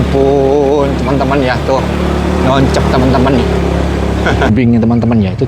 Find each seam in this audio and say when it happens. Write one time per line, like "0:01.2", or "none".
0:04.5

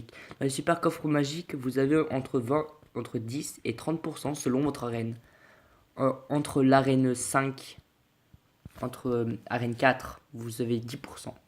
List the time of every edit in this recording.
0:06.5

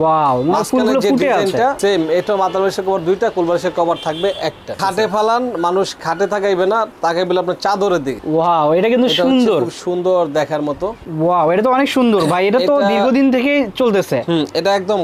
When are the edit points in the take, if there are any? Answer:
0:01.8
0:04.8
0:08.2
0:11.0

